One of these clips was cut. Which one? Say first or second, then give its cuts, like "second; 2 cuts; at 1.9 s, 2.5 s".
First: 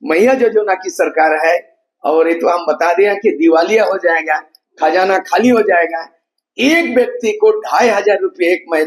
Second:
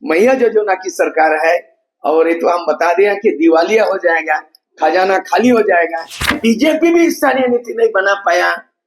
second; 1 cut; at 6.4 s